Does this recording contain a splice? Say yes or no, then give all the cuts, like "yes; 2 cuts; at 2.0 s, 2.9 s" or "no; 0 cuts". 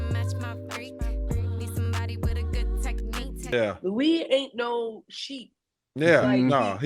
yes; 1 cut; at 3.5 s